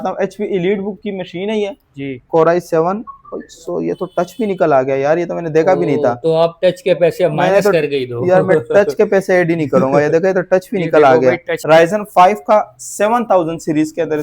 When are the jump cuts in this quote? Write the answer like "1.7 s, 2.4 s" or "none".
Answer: 2.2 s, 11.5 s